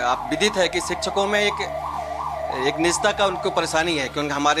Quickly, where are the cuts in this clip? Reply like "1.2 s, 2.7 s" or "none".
none